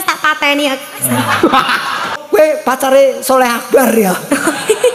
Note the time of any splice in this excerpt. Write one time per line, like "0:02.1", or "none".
0:02.1